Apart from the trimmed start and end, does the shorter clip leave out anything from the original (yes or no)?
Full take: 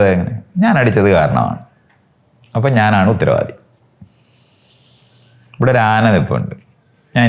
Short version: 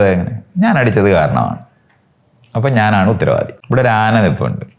yes